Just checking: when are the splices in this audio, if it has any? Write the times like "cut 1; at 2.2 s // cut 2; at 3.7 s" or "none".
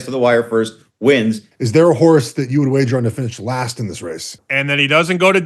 cut 1; at 1.5 s // cut 2; at 4.4 s

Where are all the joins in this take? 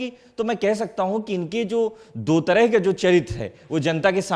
none

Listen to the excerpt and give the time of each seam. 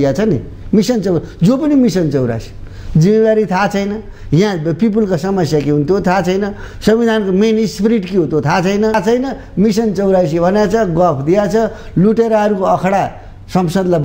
cut 1; at 8.9 s

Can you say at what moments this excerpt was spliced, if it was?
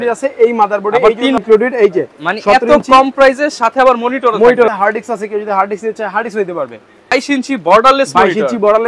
cut 1; at 1.4 s // cut 2; at 4.7 s // cut 3; at 7.1 s

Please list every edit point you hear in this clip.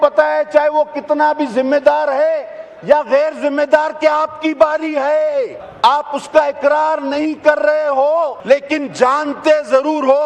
cut 1; at 5.6 s // cut 2; at 8.4 s

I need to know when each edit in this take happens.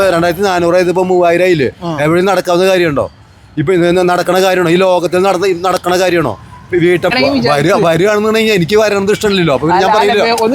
cut 1; at 7.1 s

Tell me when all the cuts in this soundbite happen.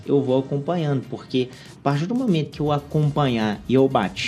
none

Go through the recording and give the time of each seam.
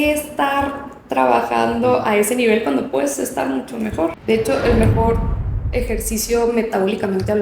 cut 1; at 4.2 s

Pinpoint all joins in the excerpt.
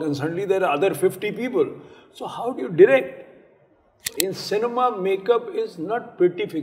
cut 1; at 4.0 s

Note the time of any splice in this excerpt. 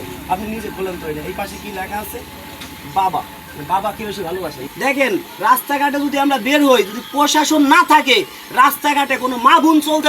cut 1; at 4.6 s

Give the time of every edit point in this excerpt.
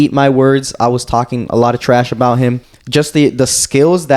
cut 1; at 2.7 s

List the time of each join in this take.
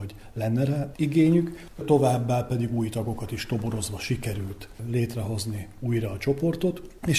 cut 1; at 0.9 s // cut 2; at 1.8 s

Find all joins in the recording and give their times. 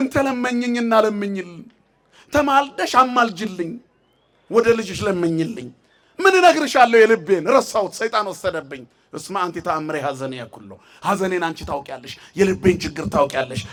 none

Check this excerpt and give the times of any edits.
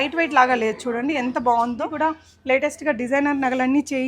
cut 1; at 1.9 s

